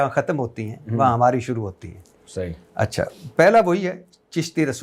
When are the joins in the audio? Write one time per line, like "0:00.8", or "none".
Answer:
none

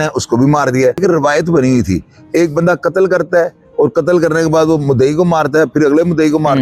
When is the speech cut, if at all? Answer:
0:01.0

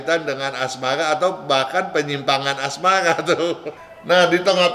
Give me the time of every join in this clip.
0:03.7

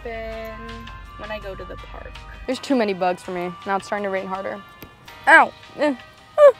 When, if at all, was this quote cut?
0:02.4

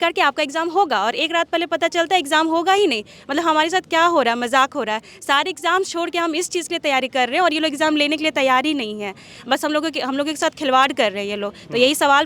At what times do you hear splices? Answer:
none

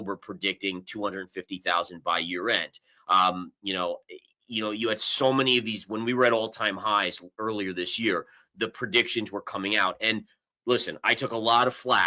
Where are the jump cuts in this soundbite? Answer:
none

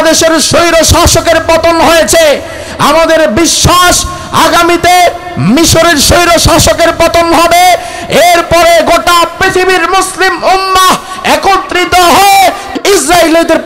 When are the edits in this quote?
0:12.7

